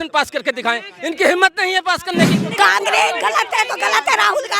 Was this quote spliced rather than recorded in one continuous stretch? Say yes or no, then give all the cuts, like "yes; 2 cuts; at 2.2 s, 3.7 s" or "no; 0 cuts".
yes; 1 cut; at 2.4 s